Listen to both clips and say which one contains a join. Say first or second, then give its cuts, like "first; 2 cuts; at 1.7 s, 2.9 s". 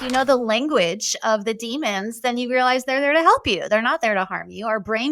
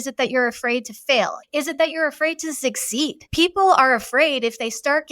second; 2 cuts; at 1.4 s, 3.2 s